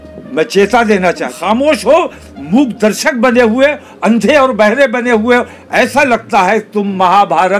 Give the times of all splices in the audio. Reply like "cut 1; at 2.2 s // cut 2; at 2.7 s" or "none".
cut 1; at 1.3 s